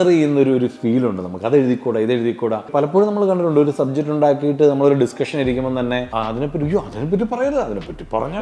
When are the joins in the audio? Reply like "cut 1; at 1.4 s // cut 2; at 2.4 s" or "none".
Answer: cut 1; at 2.7 s // cut 2; at 6.1 s